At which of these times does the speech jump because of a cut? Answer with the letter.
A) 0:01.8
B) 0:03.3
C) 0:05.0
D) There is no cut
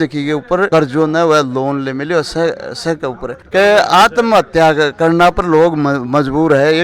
B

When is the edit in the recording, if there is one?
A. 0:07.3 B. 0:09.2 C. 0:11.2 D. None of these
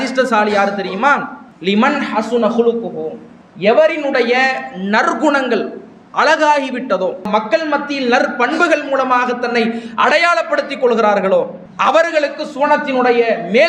A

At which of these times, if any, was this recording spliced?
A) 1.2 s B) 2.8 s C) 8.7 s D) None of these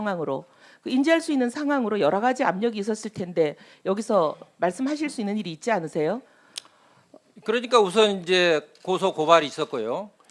B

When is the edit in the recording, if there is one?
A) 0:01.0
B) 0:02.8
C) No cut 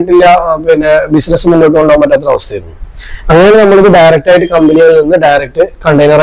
C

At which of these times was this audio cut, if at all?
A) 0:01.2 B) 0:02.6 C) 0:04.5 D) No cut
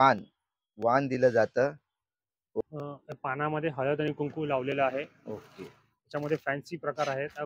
B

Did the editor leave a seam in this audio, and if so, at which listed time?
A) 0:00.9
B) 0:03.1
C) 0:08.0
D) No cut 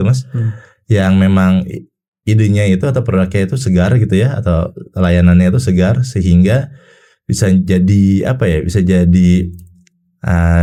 D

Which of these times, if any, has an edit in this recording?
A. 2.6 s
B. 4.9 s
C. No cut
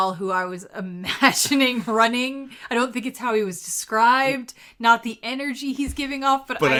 C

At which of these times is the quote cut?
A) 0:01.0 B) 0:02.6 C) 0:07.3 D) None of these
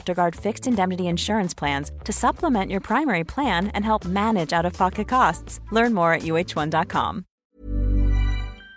C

